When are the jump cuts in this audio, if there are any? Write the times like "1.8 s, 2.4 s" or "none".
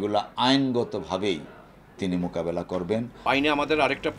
3.2 s

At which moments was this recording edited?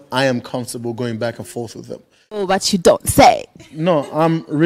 2.4 s

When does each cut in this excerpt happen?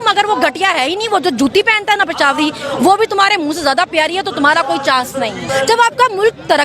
5.4 s

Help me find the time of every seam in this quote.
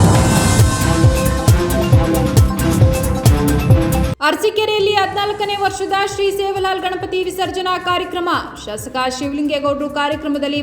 4.1 s

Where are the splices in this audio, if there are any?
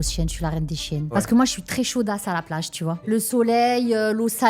1.1 s, 3.0 s

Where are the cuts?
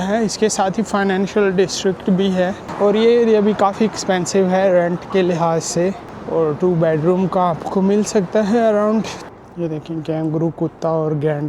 2.6 s, 6.1 s, 9.2 s

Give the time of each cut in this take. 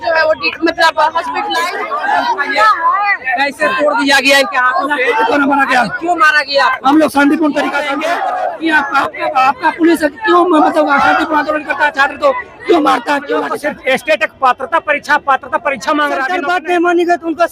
1.6 s, 7.9 s, 13.5 s, 16.4 s

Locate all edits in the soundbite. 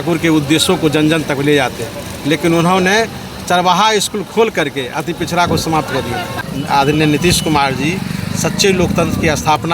6.5 s

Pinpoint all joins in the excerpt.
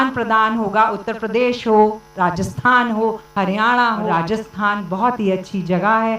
4.1 s

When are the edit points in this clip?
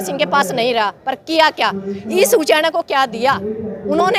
none

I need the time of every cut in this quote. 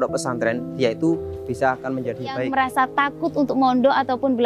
2.5 s

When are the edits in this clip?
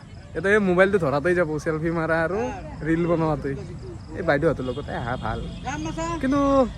none

